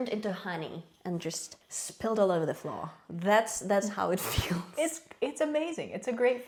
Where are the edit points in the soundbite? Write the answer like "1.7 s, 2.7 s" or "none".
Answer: none